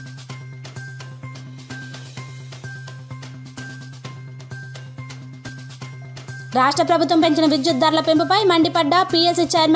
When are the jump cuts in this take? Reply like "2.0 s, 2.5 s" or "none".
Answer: 3.2 s, 6.5 s

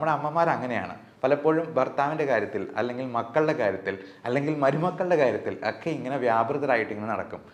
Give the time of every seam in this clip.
none

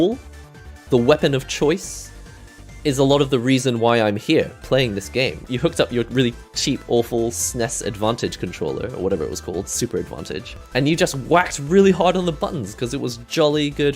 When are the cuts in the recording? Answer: 5.5 s, 10.6 s

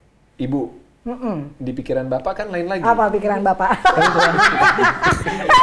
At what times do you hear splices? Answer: none

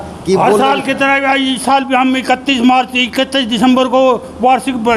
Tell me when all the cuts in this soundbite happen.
none

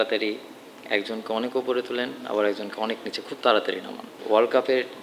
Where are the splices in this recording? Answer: 4.1 s

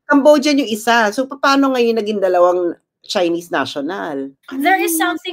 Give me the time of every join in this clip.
4.4 s

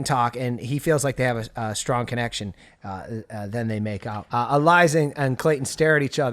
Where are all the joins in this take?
4.2 s

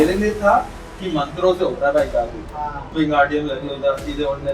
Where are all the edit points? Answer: 2.5 s

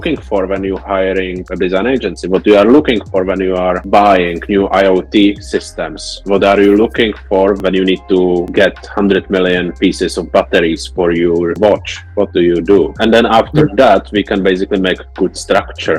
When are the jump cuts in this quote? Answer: none

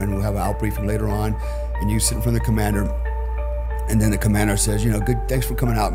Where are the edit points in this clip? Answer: none

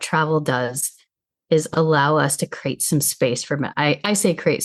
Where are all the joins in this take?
none

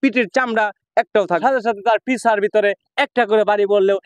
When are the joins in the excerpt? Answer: 1.4 s

